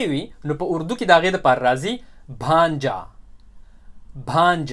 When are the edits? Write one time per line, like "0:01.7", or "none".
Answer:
none